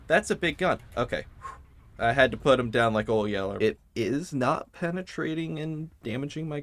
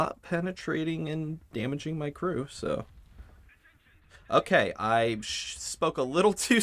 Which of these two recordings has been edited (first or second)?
first